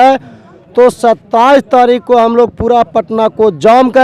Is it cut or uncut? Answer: uncut